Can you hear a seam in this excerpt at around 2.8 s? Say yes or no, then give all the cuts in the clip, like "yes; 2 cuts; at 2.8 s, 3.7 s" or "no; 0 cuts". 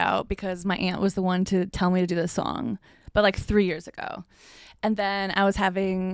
no; 0 cuts